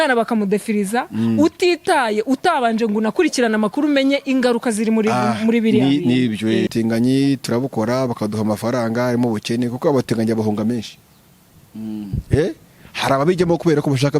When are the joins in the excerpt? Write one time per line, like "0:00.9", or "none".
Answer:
0:06.7